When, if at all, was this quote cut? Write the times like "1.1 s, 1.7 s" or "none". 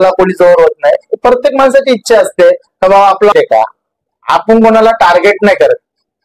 3.3 s

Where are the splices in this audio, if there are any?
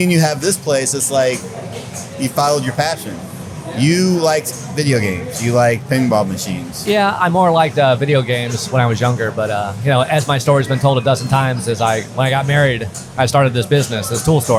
none

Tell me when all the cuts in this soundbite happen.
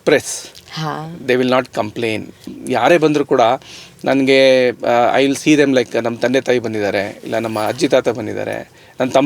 2.6 s

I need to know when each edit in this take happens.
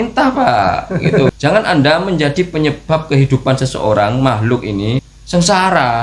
1.3 s, 5.1 s

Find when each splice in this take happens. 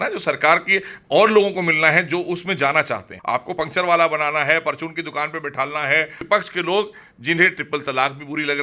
3.1 s, 6.2 s

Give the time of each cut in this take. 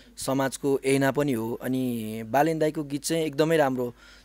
none

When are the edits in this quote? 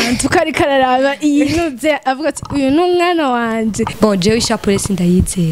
3.9 s

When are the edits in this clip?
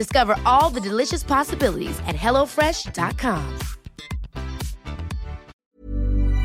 5.5 s

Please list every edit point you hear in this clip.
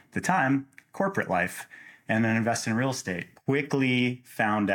3.3 s

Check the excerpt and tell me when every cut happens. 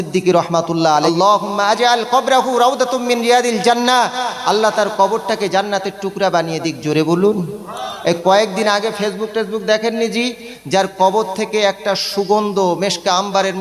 1.1 s

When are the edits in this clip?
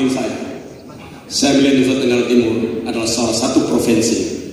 none

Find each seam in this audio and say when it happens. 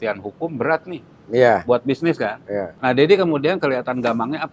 2.7 s

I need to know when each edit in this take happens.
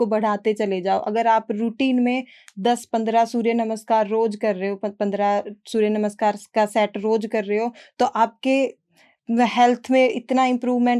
none

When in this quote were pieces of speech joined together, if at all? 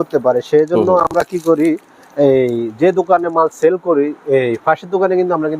none

